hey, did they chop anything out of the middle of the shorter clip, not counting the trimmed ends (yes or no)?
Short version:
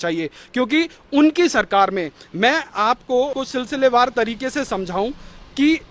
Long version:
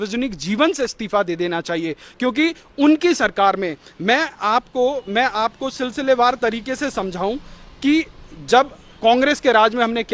yes